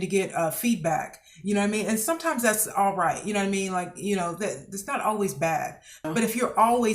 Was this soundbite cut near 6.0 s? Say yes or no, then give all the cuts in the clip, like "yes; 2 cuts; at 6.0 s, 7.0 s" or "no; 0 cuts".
yes; 1 cut; at 6.0 s